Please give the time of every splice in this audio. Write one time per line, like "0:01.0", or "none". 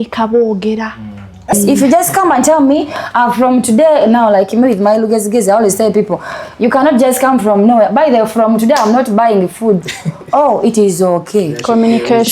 0:01.5